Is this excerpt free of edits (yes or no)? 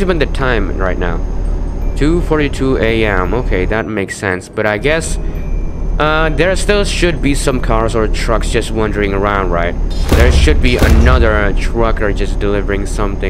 yes